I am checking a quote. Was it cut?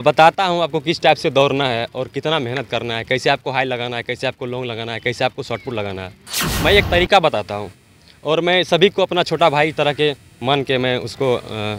no; 0 cuts

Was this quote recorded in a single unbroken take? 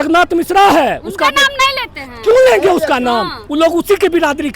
no; 1 cut; at 3.4 s

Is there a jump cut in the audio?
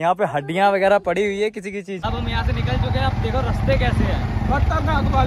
yes; 1 cut; at 1.9 s

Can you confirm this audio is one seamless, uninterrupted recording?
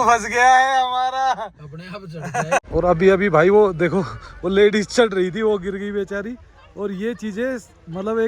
no; 1 cut; at 2.7 s

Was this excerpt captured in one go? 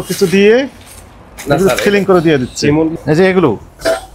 yes; 0 cuts

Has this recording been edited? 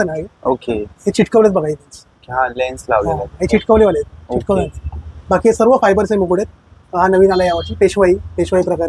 no; 0 cuts

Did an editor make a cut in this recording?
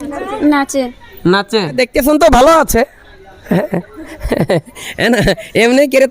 yes; 1 cut; at 1.7 s

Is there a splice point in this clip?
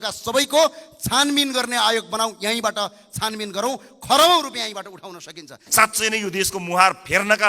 yes; 1 cut; at 5.6 s

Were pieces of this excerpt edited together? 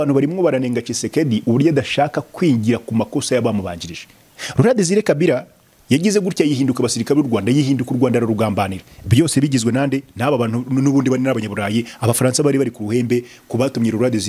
no; 0 cuts

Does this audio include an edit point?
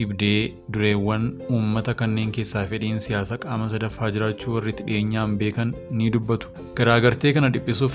yes; 1 cut; at 6.2 s

